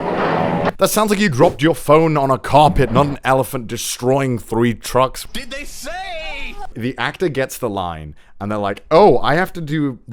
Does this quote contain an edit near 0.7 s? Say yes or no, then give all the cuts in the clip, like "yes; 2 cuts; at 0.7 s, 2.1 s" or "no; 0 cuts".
yes; 3 cuts; at 0.7 s, 5.2 s, 6.7 s